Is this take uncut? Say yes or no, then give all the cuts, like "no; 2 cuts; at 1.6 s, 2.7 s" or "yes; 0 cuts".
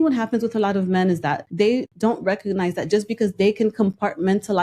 no; 1 cut; at 1.7 s